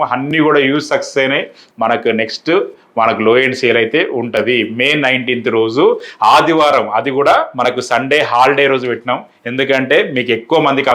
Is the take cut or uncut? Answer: cut